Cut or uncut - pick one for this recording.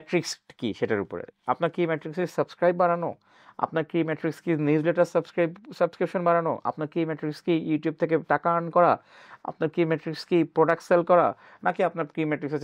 uncut